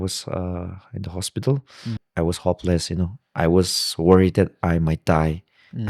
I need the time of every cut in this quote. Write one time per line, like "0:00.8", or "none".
0:02.0